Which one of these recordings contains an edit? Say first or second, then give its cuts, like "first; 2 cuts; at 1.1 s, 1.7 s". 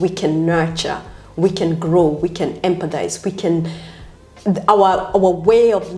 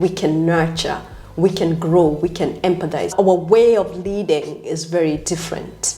second; 1 cut; at 3.1 s